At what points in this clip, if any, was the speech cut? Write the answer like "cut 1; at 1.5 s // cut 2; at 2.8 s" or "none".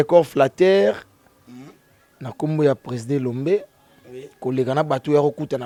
none